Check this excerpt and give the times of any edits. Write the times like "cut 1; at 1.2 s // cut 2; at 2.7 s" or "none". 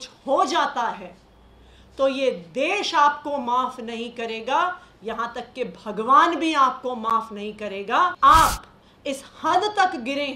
cut 1; at 8.1 s